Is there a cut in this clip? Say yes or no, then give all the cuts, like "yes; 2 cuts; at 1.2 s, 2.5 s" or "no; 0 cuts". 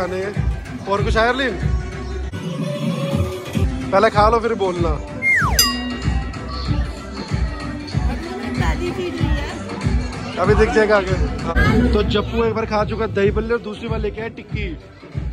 no; 0 cuts